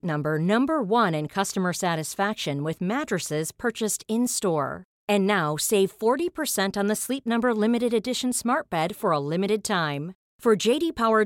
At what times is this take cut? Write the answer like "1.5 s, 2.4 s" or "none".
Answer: none